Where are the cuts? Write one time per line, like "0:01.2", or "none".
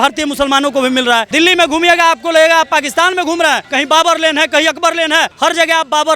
0:01.3
0:03.7
0:05.3